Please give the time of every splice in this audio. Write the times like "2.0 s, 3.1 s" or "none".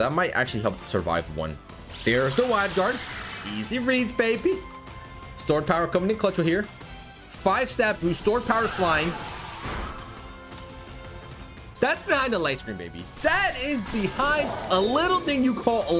none